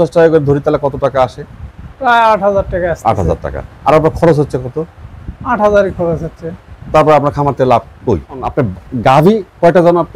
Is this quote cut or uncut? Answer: uncut